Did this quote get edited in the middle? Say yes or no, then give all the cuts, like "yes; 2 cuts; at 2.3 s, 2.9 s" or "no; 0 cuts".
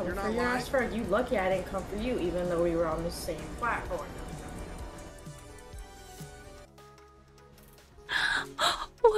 no; 0 cuts